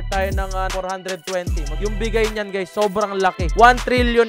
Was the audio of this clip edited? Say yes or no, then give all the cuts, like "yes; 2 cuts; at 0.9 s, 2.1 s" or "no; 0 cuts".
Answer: no; 0 cuts